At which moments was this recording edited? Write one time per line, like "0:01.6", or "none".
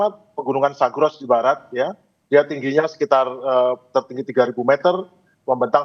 none